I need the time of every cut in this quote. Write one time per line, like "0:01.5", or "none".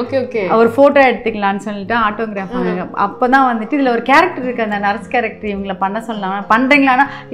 none